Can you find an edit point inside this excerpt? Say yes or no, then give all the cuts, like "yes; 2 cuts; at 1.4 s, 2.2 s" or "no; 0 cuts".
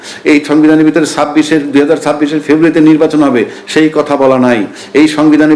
no; 0 cuts